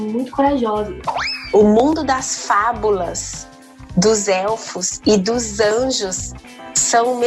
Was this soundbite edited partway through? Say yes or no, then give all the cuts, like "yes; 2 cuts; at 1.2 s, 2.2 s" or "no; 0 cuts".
yes; 1 cut; at 1.0 s